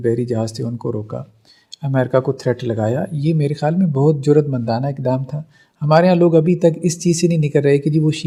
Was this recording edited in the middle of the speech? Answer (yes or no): no